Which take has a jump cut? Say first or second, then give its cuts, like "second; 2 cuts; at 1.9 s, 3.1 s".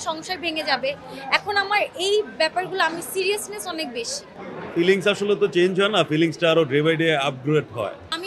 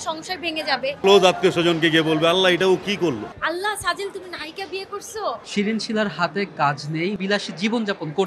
second; 4 cuts; at 1.0 s, 3.3 s, 5.4 s, 7.2 s